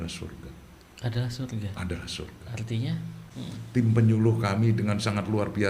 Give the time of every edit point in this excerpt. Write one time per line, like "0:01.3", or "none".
0:03.2